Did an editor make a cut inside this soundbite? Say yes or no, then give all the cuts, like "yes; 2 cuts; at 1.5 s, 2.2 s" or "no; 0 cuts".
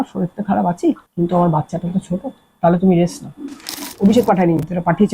yes; 1 cut; at 3.9 s